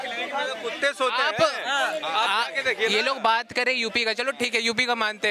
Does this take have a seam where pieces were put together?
no; 0 cuts

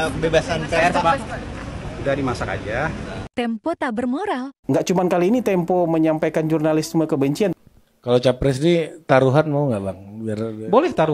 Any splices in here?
yes; 2 cuts; at 3.2 s, 7.6 s

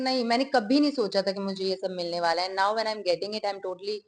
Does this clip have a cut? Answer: no; 0 cuts

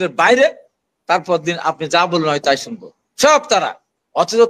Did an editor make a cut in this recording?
no; 0 cuts

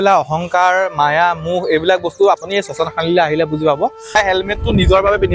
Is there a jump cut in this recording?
yes; 1 cut; at 4.2 s

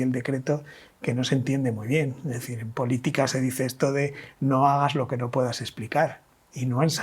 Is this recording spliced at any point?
no; 0 cuts

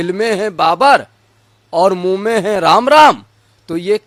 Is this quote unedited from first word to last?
yes; 0 cuts

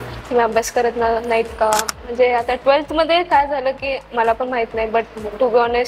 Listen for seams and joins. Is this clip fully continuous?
no; 1 cut; at 2.0 s

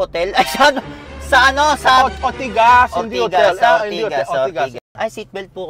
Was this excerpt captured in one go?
no; 1 cut; at 4.8 s

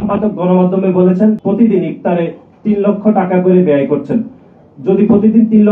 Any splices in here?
yes; 1 cut; at 1.4 s

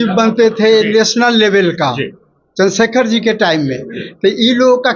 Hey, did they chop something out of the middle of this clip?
no; 0 cuts

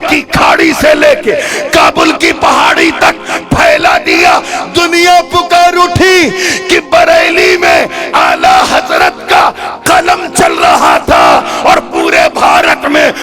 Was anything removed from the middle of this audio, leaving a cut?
no; 0 cuts

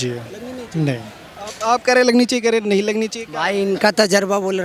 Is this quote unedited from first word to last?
yes; 0 cuts

